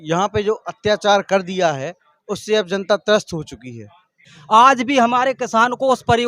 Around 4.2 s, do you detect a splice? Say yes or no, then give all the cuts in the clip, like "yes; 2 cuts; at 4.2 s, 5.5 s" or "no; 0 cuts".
yes; 1 cut; at 4.2 s